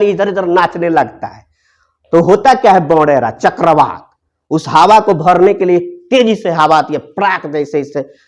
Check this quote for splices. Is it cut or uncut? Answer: uncut